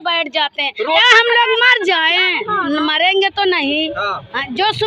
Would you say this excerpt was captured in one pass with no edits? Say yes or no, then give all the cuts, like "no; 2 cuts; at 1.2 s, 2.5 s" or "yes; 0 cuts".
no; 1 cut; at 1.0 s